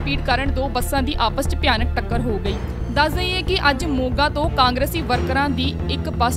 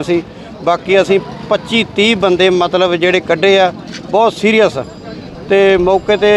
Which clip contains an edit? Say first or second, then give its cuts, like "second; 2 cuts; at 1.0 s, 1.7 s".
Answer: second; 1 cut; at 4.7 s